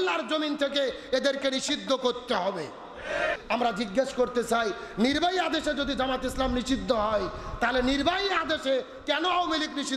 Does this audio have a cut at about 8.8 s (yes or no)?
no